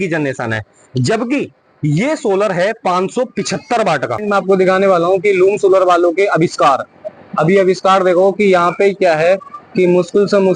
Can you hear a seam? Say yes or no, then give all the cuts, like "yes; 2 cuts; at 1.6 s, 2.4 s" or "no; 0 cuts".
yes; 1 cut; at 4.1 s